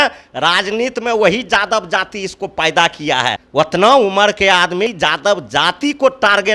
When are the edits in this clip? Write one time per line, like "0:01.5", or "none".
0:03.4
0:04.9

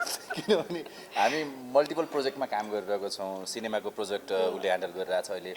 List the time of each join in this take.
none

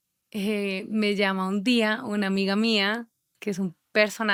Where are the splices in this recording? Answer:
none

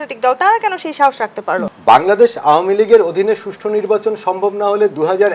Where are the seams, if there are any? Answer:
0:01.7

